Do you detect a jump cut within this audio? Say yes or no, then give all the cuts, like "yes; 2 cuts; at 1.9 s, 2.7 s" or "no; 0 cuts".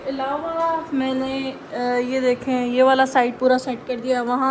no; 0 cuts